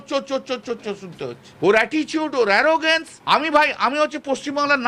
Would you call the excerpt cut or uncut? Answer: cut